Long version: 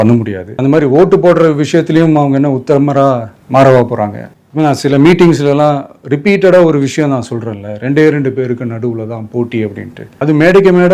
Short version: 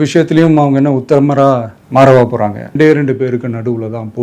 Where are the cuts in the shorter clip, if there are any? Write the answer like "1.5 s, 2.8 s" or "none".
2.6 s